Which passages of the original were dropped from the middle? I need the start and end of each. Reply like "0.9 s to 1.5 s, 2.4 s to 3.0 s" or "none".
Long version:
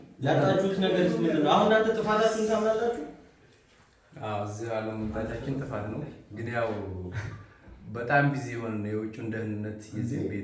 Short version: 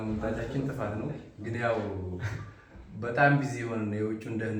none